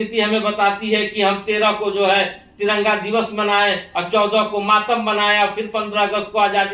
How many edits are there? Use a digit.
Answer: 0